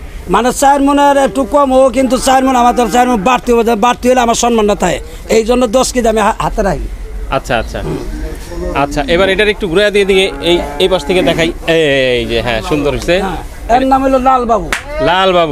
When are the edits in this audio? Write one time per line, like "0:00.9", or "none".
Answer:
none

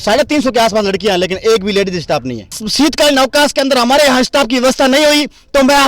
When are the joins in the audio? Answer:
0:02.6

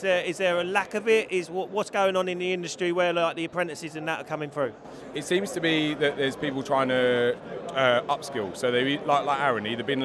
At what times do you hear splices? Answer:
none

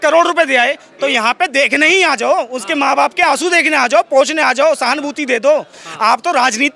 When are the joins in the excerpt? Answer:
none

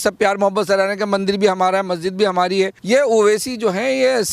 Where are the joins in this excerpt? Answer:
0:02.8

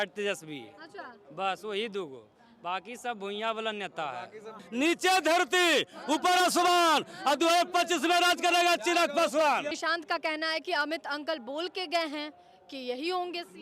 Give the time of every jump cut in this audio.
0:04.6
0:09.7

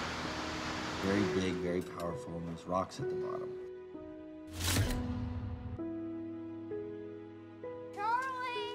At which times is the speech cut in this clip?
none

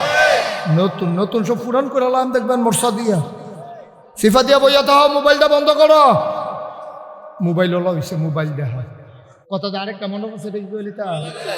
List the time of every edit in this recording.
0:09.4

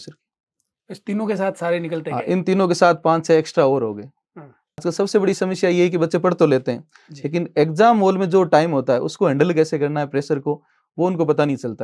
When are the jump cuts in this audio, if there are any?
0:04.8

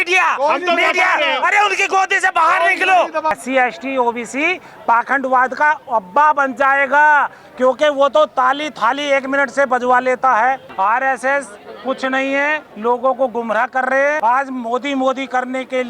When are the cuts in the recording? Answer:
0:03.4
0:10.7
0:14.2

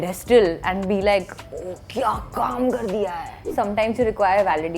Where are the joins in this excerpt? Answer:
0:03.5

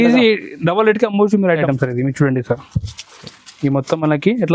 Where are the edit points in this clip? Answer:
0:01.6

